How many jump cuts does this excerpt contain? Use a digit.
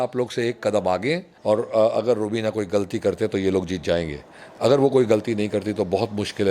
1